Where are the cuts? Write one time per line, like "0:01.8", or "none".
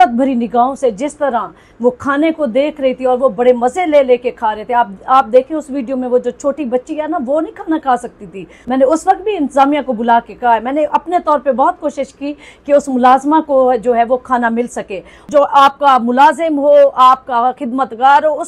0:08.5
0:15.2